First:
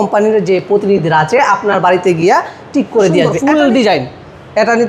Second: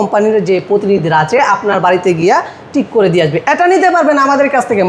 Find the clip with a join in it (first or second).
first